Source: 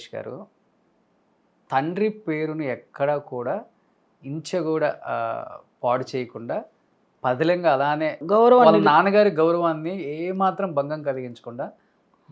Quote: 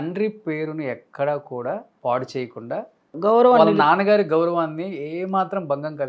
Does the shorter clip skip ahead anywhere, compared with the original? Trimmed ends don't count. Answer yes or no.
yes